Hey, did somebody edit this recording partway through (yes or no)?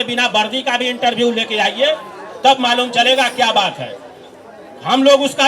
no